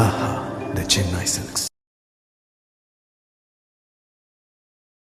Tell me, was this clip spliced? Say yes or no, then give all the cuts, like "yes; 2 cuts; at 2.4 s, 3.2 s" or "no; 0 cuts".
no; 0 cuts